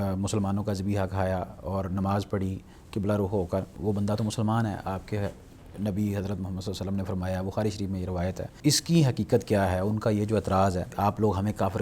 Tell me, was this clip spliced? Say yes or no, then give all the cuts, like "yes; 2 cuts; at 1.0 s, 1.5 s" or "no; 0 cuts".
yes; 3 cuts; at 3.7 s, 8.6 s, 10.9 s